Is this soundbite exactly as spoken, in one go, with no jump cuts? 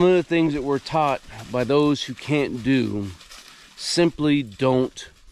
yes; 0 cuts

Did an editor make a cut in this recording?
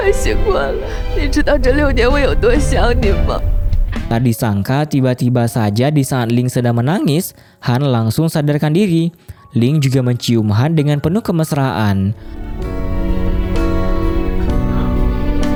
no; 0 cuts

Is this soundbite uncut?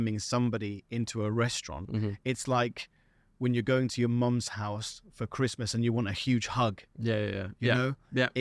yes; 0 cuts

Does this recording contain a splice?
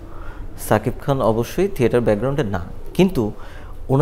no; 0 cuts

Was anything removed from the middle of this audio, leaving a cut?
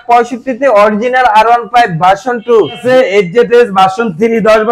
yes; 1 cut; at 2.8 s

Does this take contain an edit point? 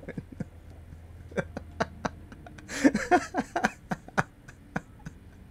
no; 0 cuts

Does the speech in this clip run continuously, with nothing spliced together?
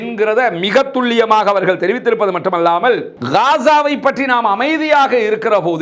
no; 1 cut; at 3.2 s

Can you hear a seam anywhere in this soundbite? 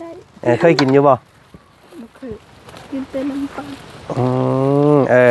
no; 0 cuts

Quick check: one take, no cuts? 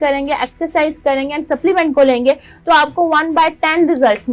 yes; 0 cuts

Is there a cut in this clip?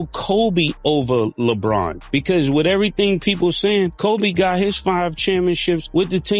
no; 0 cuts

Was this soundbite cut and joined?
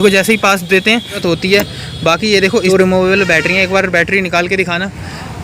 yes; 2 cuts; at 1.2 s, 2.7 s

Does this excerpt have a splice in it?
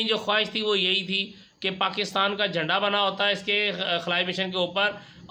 no; 0 cuts

